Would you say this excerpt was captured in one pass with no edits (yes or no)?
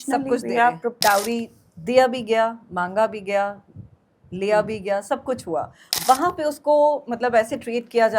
no